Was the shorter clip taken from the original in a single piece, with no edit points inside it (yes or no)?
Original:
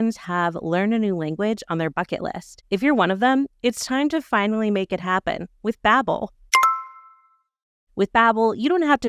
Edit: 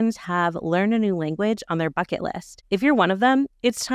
yes